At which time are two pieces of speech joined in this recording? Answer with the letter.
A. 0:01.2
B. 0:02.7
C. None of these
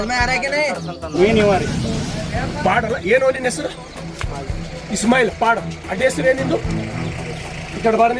A